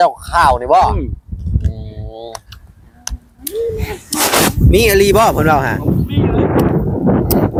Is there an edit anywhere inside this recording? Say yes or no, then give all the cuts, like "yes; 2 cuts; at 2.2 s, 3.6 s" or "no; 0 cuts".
no; 0 cuts